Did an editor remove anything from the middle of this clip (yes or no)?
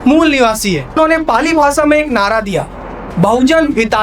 yes